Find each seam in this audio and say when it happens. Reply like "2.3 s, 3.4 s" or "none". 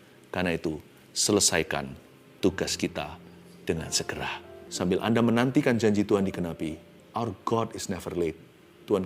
4.6 s, 6.9 s